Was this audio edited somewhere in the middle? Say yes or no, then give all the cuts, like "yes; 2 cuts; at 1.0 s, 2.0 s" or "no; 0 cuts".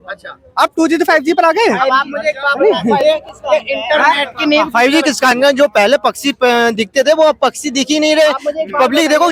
no; 0 cuts